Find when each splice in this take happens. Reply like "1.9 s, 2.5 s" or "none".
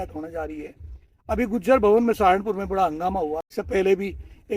3.5 s